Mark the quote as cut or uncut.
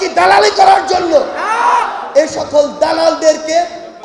uncut